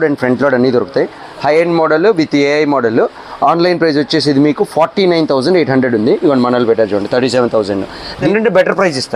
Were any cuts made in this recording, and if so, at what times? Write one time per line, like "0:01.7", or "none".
0:01.2
0:08.2